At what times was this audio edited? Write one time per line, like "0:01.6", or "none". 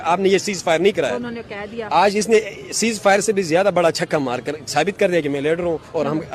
none